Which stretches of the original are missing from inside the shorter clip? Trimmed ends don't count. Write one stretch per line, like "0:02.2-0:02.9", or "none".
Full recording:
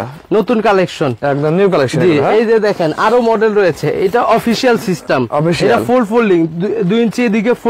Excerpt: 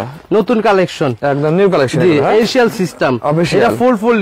0:02.4-0:04.5